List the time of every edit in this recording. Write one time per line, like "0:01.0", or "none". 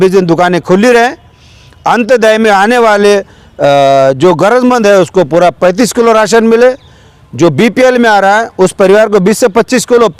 none